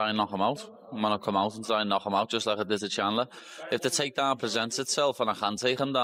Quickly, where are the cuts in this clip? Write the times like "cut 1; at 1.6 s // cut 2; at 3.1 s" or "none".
none